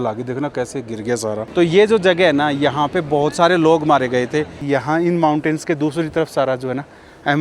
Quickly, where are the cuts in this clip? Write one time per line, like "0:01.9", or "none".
0:01.4
0:04.6